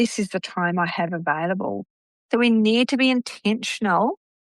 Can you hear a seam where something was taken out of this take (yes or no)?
yes